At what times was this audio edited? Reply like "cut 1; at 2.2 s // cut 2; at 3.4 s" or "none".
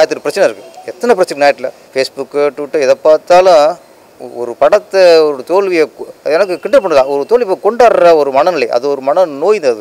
cut 1; at 1.8 s